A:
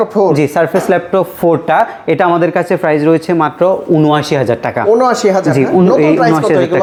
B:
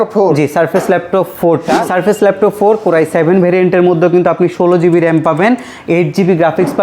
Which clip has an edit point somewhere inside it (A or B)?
B